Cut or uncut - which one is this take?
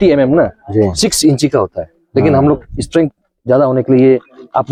uncut